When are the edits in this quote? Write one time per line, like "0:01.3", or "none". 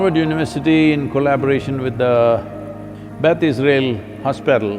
none